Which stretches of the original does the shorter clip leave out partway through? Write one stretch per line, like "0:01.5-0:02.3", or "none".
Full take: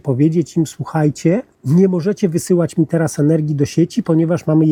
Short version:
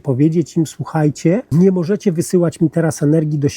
0:01.5-0:01.6